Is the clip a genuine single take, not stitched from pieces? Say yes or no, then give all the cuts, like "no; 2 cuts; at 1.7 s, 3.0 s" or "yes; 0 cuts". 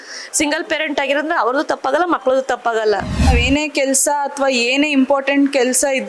no; 1 cut; at 3.3 s